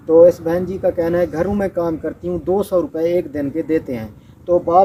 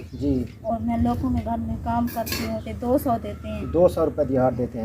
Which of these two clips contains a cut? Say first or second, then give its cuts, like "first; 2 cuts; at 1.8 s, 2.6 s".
second; 1 cut; at 2.7 s